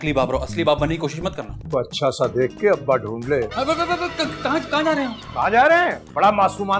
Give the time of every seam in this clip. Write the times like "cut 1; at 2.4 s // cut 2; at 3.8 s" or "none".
cut 1; at 1.5 s